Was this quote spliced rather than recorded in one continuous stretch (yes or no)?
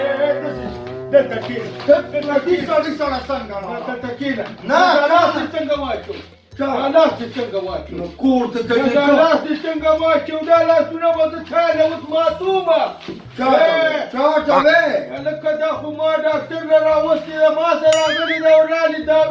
no